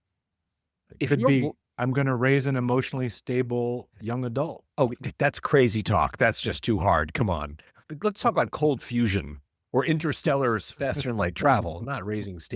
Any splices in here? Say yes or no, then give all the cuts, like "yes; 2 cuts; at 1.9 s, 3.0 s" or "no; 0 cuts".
yes; 1 cut; at 7.8 s